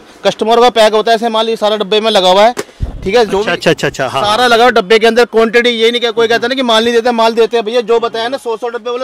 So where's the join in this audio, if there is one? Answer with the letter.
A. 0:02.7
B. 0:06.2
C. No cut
C